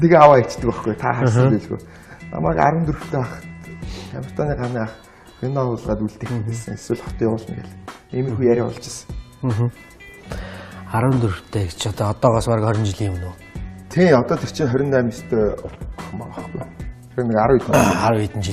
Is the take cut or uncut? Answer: cut